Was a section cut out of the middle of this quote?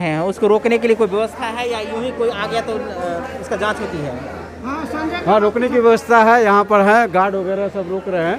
no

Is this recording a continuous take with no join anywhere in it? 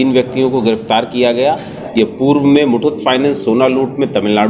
no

